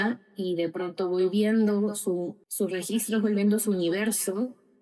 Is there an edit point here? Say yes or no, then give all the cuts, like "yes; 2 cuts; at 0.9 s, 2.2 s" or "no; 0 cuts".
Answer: yes; 1 cut; at 2.4 s